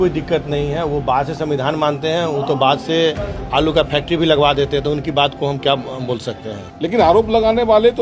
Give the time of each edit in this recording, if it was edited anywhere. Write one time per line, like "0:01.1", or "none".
0:06.6